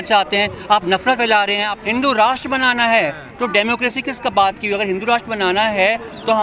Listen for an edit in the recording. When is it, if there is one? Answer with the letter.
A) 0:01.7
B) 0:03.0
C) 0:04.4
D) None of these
A